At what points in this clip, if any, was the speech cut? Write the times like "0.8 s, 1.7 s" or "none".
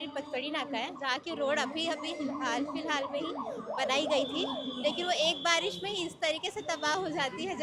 none